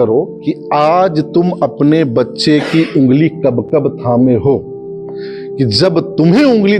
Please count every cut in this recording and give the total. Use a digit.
0